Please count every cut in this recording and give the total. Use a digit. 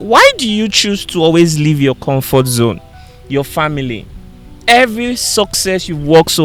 0